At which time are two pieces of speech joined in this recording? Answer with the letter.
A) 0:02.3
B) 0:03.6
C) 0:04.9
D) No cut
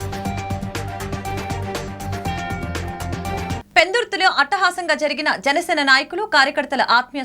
B